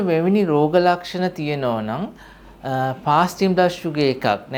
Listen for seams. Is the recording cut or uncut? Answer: uncut